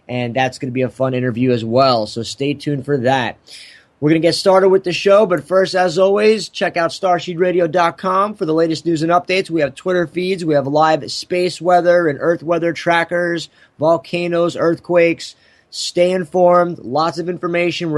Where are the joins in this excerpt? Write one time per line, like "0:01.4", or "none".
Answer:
0:08.1